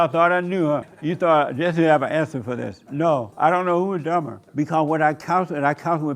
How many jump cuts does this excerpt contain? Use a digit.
2